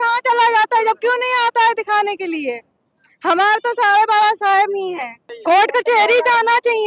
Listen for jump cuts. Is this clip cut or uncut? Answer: cut